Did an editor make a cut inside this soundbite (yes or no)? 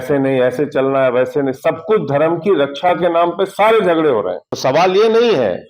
yes